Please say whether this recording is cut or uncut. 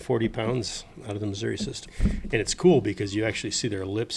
cut